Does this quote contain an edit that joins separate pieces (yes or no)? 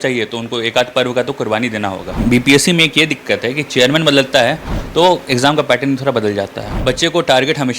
yes